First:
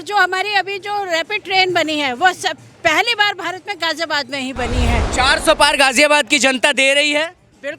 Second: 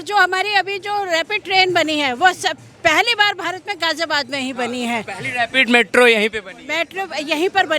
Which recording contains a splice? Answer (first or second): first